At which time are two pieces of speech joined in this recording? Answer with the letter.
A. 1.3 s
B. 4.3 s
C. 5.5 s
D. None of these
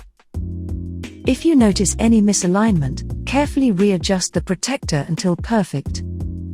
A